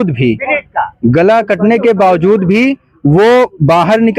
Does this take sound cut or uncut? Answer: uncut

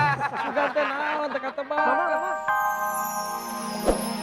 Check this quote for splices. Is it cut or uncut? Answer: cut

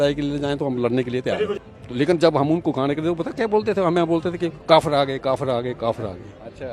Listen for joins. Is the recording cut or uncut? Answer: cut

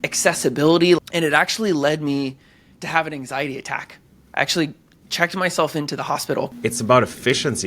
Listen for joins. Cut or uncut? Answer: cut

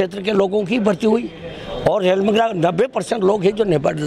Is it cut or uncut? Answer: uncut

